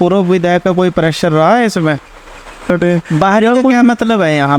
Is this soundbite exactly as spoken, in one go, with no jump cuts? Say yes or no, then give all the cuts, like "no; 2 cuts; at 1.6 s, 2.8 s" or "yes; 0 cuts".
no; 1 cut; at 2.7 s